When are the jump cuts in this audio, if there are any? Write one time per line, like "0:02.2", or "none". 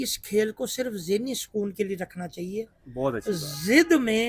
none